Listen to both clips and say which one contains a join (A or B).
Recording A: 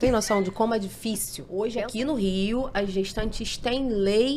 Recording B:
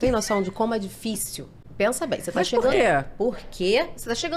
A